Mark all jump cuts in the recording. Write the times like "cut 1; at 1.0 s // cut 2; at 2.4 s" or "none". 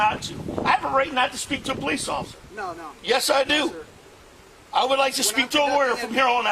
none